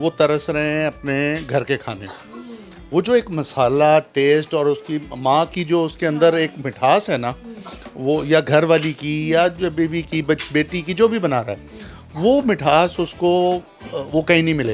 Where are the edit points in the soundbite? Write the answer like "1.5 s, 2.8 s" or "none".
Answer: none